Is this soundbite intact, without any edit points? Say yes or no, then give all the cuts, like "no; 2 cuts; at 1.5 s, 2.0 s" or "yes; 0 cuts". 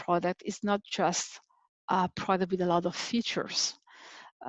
yes; 0 cuts